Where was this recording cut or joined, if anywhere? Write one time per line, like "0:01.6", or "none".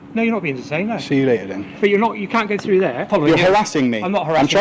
0:03.1